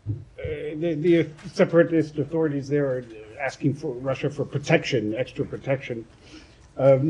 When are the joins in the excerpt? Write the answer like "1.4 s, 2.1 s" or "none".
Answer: 3.0 s